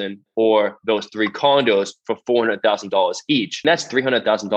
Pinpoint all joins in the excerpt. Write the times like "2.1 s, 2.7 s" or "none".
3.6 s